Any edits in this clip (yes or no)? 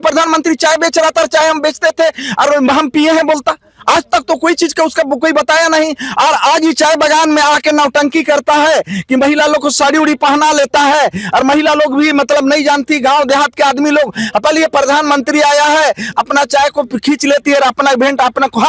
no